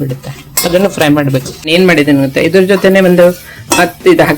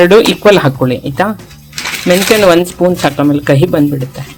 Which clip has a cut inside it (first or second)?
first